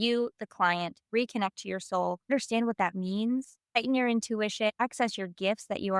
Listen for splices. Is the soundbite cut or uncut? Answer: cut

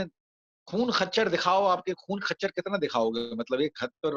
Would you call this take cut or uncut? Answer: uncut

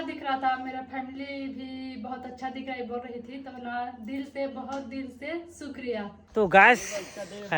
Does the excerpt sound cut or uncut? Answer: cut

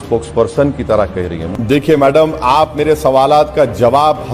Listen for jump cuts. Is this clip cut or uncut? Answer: cut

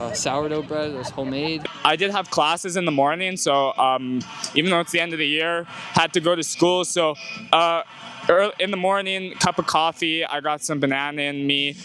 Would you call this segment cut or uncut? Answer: cut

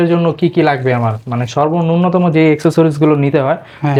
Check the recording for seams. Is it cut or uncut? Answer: uncut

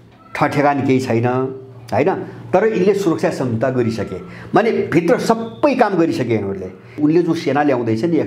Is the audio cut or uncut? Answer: cut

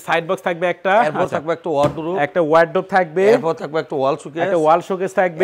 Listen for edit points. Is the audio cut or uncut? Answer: uncut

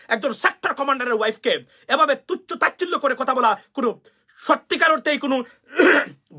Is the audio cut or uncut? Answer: uncut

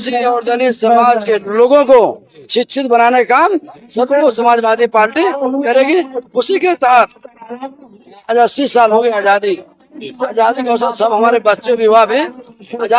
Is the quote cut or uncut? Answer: uncut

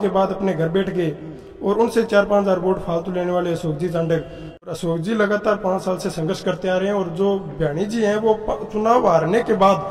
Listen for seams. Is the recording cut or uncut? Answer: cut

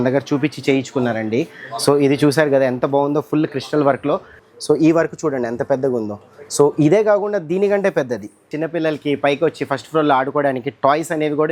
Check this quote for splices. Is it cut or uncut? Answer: cut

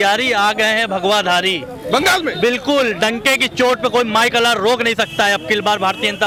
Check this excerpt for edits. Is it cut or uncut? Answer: uncut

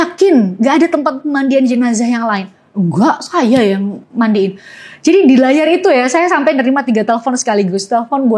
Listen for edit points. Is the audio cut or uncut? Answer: uncut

